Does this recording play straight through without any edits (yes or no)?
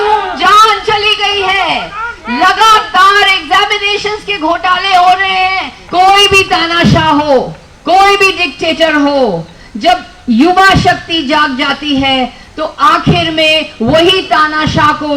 no